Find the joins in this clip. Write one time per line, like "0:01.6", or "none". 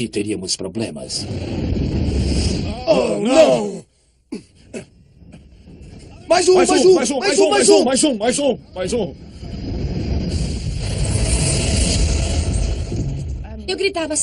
0:11.4